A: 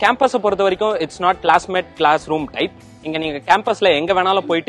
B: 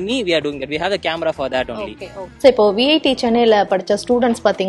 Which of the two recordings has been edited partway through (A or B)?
B